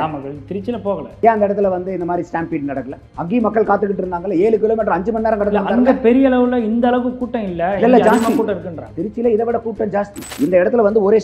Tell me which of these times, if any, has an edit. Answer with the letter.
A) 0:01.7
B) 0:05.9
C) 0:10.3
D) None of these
C